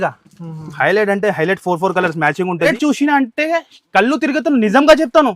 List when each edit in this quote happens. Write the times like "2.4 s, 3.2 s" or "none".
2.7 s